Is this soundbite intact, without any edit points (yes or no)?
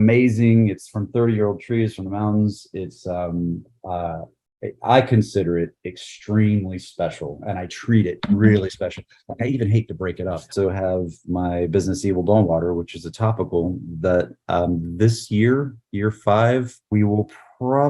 no